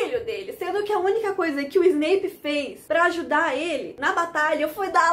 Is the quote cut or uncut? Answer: cut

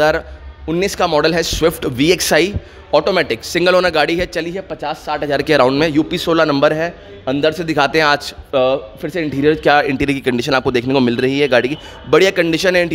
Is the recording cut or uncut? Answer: uncut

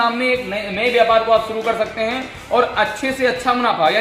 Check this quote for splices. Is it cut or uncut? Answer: uncut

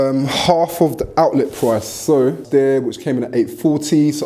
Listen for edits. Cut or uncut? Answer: cut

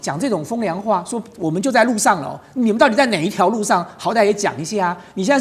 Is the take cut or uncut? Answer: uncut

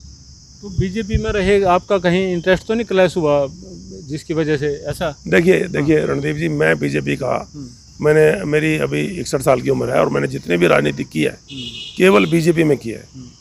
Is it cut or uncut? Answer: uncut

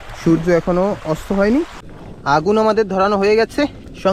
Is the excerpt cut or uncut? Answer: cut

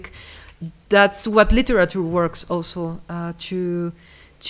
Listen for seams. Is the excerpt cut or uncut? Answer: uncut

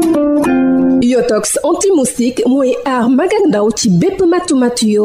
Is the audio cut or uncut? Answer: cut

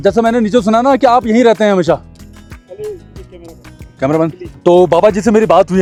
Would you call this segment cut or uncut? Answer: uncut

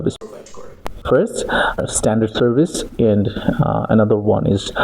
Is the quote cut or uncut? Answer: cut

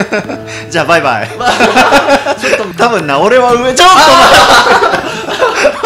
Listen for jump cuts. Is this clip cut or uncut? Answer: cut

